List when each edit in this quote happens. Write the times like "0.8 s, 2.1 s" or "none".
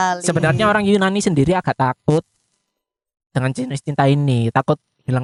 none